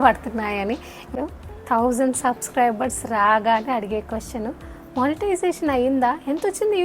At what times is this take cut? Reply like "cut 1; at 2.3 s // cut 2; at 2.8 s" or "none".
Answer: cut 1; at 1.1 s